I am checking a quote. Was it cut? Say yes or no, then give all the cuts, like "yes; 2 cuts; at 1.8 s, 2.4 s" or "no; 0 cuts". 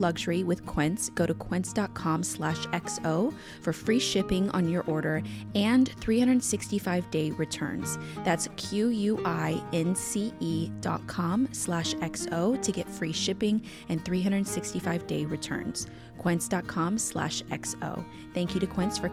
no; 0 cuts